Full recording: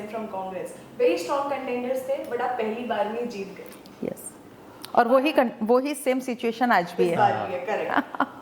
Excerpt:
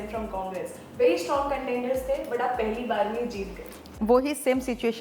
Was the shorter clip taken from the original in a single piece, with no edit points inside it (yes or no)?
no